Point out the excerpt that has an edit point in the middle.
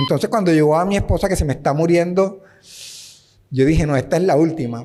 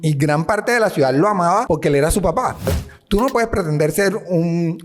second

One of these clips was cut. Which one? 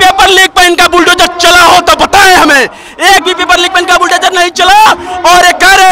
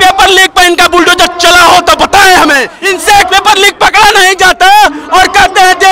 second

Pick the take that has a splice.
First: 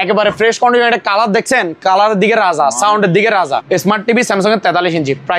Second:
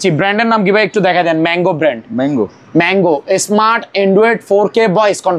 first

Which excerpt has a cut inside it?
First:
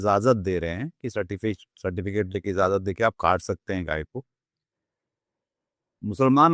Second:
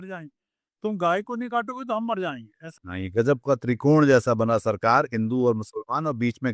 second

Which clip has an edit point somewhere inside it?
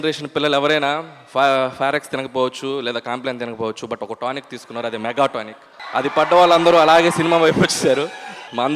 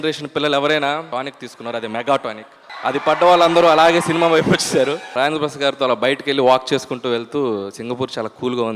second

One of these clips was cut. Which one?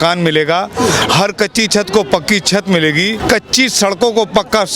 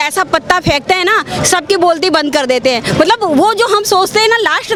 first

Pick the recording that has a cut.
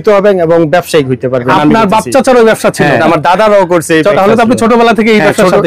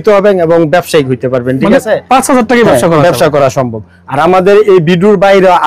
first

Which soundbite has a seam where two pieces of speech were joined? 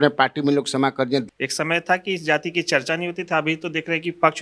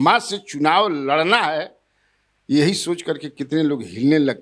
first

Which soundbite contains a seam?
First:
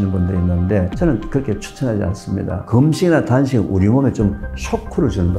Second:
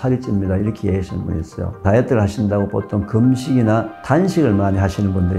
second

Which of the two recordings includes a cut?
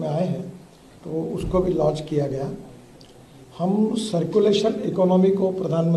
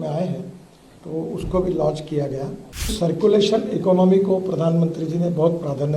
second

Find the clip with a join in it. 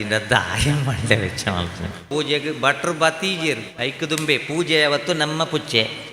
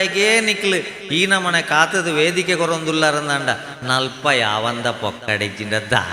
first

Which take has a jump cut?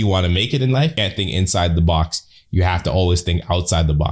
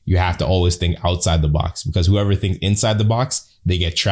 first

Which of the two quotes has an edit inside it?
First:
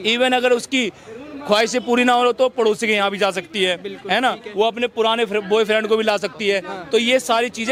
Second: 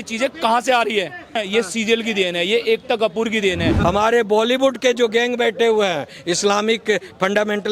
second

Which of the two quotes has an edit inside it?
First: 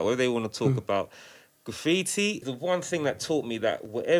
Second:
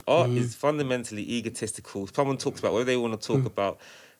first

